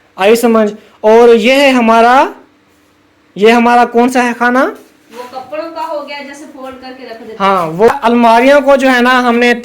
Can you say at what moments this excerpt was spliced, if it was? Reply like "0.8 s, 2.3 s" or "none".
7.9 s